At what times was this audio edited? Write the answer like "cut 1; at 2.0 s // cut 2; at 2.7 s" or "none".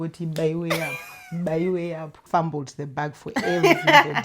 cut 1; at 2.2 s